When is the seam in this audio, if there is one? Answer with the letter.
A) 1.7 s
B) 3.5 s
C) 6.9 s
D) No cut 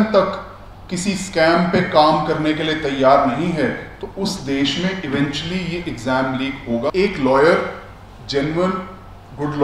C